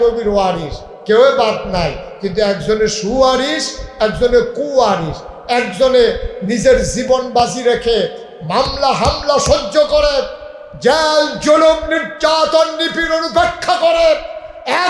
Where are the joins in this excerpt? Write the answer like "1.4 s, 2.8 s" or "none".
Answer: none